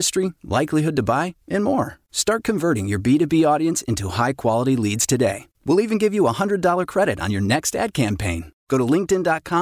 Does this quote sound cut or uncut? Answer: uncut